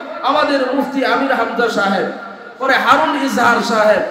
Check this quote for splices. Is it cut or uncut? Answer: uncut